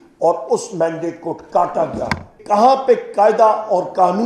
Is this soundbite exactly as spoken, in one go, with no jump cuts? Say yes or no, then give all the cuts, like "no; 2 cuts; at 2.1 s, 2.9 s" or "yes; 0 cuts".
no; 1 cut; at 2.4 s